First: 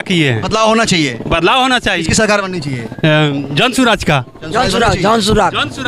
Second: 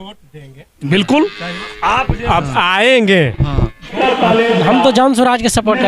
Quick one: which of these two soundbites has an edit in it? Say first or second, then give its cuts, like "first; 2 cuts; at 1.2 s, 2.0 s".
second; 1 cut; at 3.9 s